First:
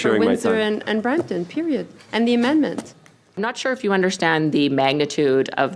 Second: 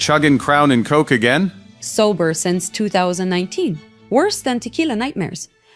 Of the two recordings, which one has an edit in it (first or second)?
first